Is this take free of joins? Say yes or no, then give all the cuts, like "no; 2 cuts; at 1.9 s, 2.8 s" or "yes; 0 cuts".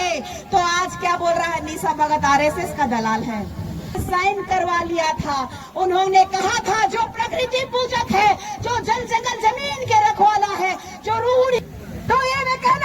no; 2 cuts; at 4.0 s, 11.6 s